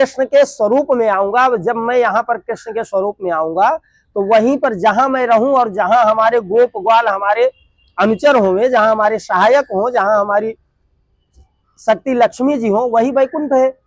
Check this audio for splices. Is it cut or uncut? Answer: uncut